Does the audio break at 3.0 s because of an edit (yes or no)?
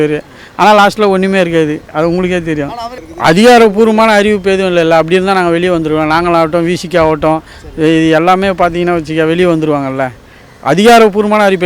yes